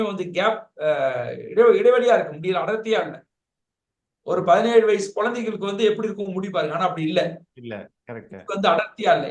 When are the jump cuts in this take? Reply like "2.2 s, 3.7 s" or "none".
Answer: none